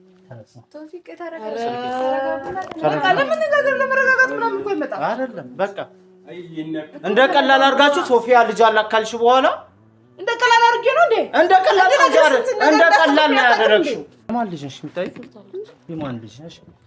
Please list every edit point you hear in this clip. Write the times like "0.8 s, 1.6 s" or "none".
14.3 s